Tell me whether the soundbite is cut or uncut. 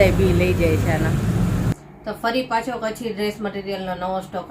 cut